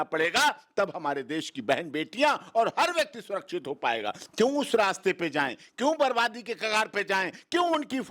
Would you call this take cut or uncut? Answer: cut